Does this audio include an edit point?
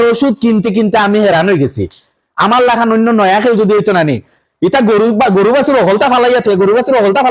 no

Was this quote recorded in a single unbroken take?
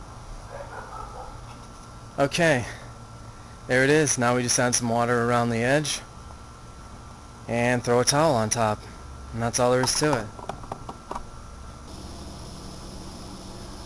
no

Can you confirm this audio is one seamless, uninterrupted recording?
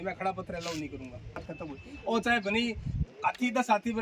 no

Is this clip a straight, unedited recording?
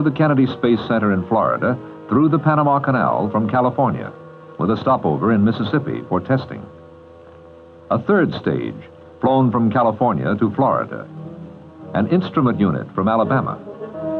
yes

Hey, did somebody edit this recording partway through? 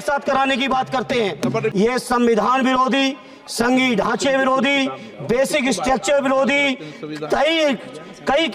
yes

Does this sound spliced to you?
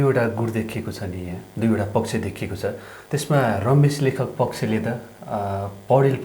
no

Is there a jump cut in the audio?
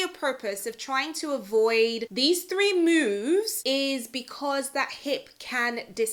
no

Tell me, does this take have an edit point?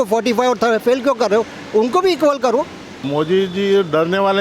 yes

